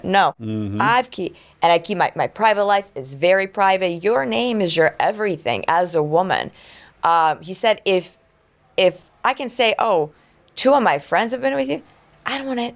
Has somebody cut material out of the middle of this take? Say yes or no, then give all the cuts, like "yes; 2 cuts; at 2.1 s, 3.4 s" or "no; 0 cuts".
no; 0 cuts